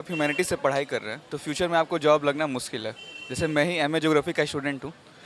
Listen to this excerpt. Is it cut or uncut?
uncut